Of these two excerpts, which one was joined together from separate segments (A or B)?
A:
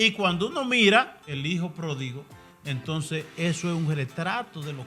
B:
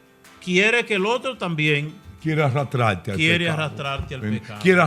A